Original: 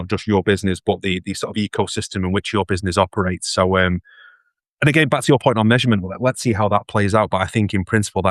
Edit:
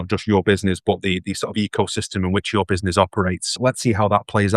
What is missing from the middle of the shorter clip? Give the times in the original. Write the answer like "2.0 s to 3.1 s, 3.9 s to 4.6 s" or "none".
3.5 s to 6.1 s